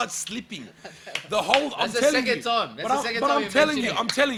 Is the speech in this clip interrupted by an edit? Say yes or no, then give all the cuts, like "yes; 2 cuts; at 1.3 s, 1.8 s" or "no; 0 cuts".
no; 0 cuts